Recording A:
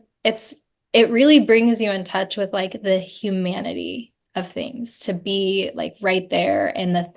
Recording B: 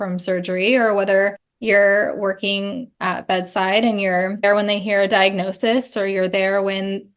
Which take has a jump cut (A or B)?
B